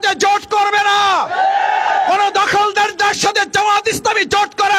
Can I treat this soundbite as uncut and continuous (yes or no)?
yes